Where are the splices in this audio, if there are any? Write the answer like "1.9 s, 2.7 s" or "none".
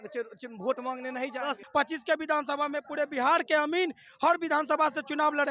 1.6 s